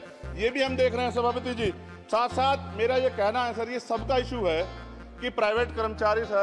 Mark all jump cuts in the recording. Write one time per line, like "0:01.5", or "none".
none